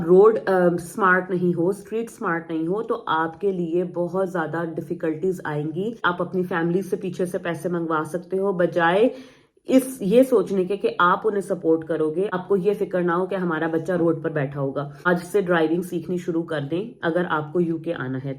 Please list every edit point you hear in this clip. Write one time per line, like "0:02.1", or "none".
0:06.1
0:12.4
0:15.1